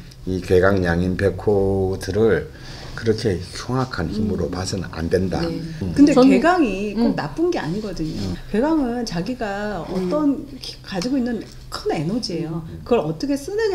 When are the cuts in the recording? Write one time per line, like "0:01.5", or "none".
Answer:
0:05.9
0:08.3